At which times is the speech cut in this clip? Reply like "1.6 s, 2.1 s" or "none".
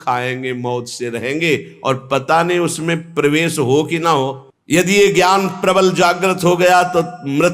4.5 s